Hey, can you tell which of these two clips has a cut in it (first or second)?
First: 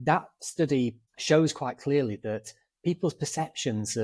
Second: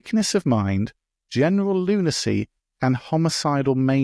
first